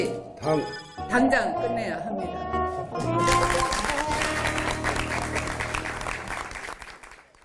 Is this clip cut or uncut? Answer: uncut